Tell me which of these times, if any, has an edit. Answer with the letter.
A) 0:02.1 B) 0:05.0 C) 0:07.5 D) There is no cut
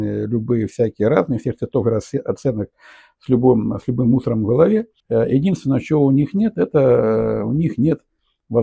B